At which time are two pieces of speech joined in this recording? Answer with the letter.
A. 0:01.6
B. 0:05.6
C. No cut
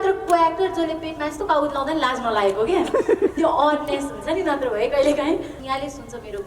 B